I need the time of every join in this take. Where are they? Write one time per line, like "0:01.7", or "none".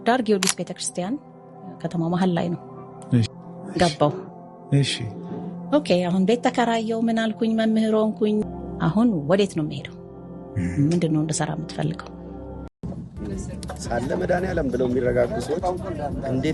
0:03.3
0:08.4
0:12.8